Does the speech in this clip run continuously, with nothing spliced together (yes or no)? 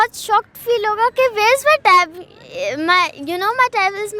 yes